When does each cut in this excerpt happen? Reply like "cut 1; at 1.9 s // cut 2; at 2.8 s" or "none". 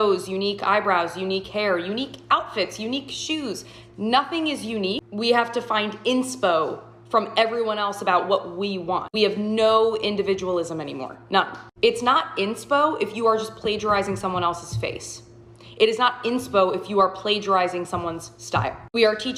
none